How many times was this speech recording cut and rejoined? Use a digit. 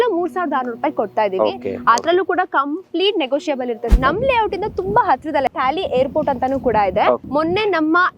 3